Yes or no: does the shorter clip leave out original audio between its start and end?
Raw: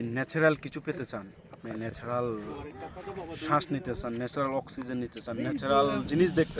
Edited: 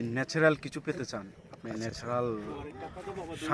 no